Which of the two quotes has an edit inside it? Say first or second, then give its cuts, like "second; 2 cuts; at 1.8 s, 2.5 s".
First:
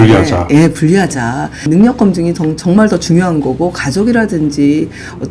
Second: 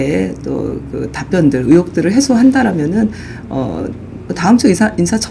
first; 1 cut; at 1.7 s